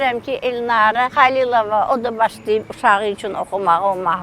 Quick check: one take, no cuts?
no; 1 cut; at 1.1 s

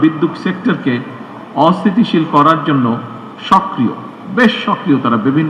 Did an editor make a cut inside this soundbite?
no; 0 cuts

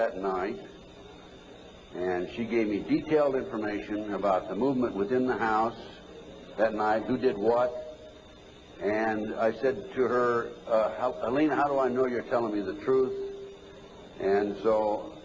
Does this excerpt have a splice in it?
no; 0 cuts

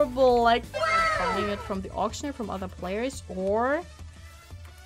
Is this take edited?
yes; 1 cut; at 1.4 s

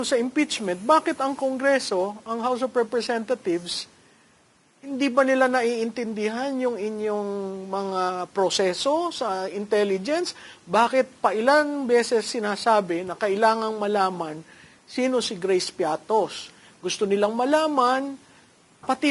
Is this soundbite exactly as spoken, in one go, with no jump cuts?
yes; 0 cuts

